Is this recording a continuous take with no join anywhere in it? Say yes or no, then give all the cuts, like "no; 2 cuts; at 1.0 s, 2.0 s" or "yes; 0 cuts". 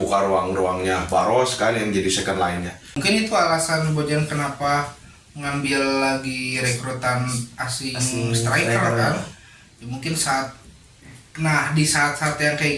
no; 1 cut; at 3.0 s